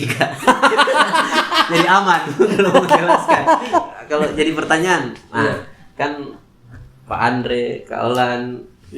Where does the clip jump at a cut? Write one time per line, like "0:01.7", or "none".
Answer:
0:04.0